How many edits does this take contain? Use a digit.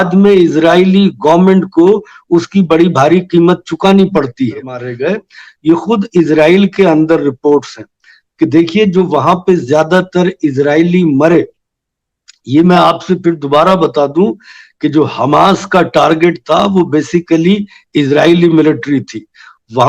1